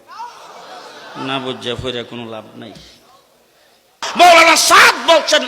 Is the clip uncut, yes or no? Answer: no